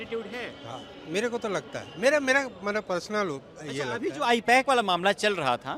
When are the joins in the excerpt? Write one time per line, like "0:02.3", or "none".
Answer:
none